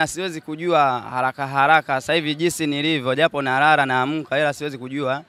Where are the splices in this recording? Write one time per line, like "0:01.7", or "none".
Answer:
none